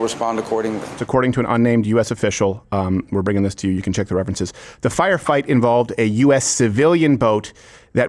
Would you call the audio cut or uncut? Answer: cut